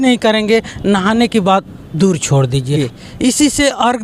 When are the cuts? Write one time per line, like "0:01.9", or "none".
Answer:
0:02.9